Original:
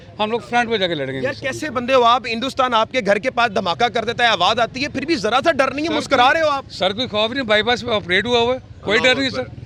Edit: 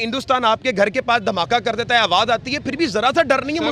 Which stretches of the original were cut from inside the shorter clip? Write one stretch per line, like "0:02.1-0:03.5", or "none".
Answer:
none